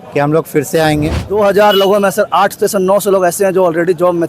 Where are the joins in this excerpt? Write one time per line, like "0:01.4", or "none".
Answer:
0:01.2